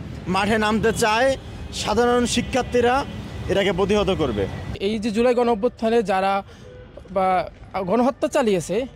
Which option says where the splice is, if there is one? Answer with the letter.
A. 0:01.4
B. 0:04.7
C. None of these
B